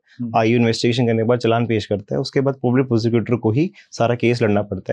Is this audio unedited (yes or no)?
yes